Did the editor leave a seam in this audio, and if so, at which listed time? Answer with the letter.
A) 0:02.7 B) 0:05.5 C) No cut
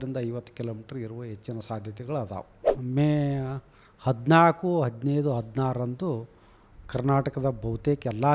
A